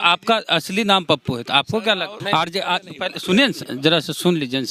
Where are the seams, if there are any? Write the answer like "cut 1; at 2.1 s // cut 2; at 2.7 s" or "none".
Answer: cut 1; at 2.1 s